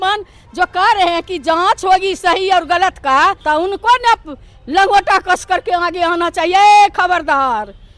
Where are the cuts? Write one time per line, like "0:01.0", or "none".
0:03.4

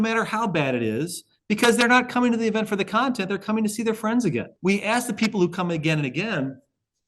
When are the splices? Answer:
0:04.5

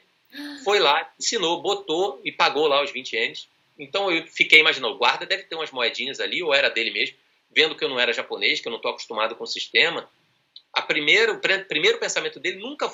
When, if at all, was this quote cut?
none

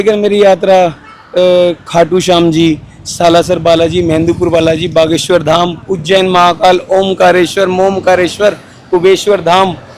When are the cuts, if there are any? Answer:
none

